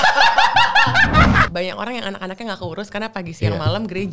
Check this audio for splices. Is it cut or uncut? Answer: cut